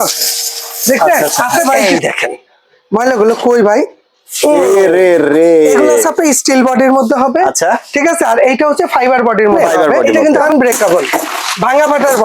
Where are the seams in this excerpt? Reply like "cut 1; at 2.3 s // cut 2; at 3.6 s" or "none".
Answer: cut 1; at 1.8 s // cut 2; at 6.1 s // cut 3; at 10.1 s